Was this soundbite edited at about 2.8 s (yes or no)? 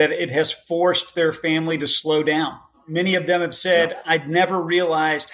yes